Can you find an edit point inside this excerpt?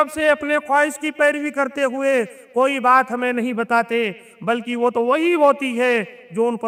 no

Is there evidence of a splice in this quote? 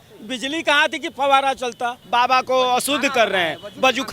yes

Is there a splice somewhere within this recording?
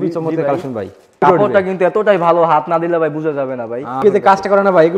yes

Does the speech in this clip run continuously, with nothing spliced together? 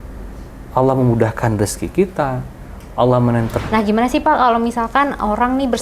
no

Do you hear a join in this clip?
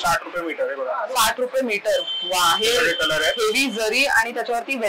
no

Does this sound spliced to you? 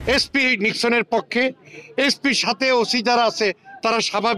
no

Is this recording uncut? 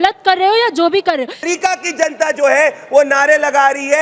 no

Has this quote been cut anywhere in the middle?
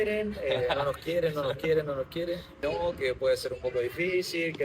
yes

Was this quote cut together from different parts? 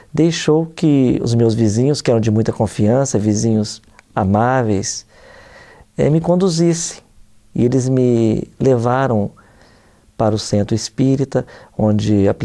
no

